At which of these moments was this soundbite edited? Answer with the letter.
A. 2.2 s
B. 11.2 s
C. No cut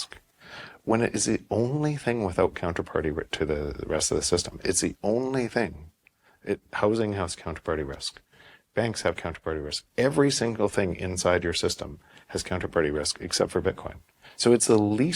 C